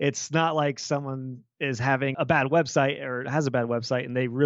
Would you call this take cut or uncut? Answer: cut